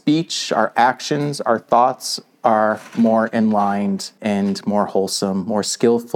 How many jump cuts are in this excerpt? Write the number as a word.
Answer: one